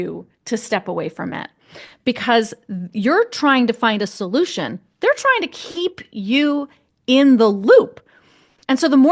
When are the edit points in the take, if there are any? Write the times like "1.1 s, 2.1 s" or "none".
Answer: none